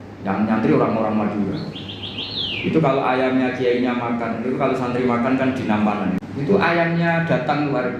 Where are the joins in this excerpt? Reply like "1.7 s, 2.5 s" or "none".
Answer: 6.2 s